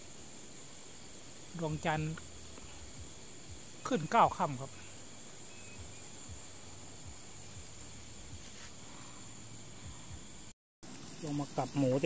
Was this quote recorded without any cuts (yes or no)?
no